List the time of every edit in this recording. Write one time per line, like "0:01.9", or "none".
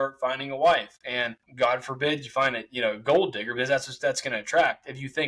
0:01.4